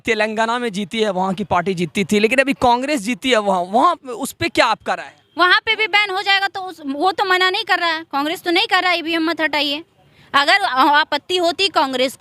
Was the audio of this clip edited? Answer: no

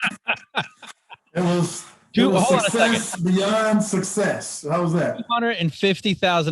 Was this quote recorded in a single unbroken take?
yes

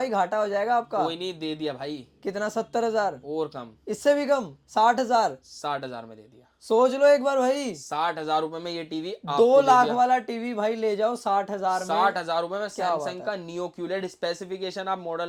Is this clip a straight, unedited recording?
yes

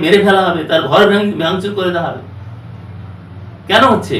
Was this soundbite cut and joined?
no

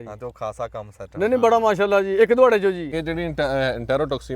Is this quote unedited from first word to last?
no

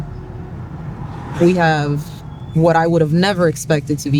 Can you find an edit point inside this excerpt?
yes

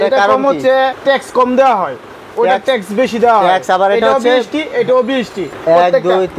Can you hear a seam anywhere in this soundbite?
yes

